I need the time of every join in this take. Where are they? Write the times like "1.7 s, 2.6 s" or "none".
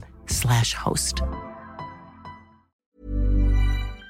2.8 s